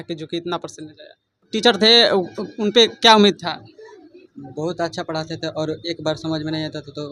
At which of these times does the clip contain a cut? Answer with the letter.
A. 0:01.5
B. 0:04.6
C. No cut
A